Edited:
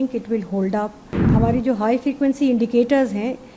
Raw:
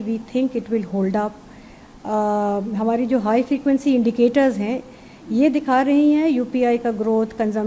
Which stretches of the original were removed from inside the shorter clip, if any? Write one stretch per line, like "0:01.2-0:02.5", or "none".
0:01.6-0:02.7